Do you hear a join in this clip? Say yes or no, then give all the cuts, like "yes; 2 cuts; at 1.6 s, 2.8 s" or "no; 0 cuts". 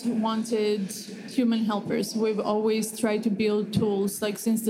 no; 0 cuts